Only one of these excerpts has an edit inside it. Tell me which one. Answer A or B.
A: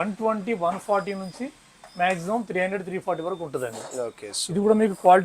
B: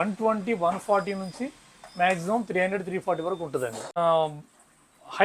B